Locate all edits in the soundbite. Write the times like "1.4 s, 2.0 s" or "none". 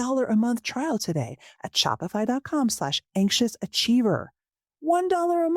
none